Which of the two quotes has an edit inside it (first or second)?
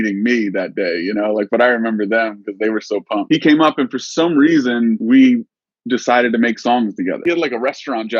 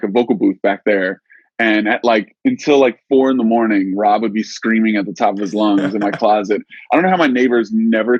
first